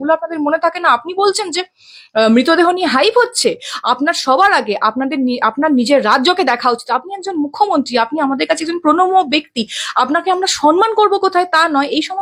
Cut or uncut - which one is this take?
uncut